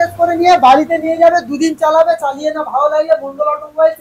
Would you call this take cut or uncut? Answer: uncut